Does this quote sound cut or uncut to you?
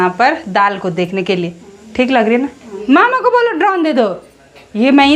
cut